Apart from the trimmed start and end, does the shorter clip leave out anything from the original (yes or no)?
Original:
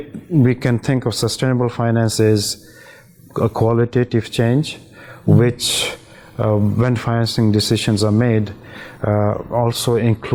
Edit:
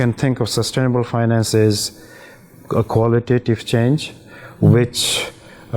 no